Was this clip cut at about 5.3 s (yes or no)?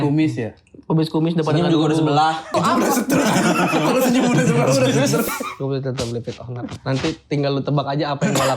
yes